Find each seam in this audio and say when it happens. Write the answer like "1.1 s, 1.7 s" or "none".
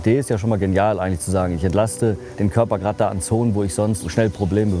none